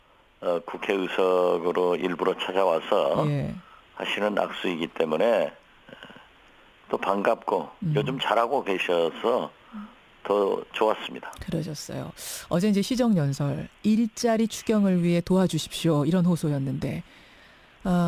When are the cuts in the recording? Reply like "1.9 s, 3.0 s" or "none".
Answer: 2.0 s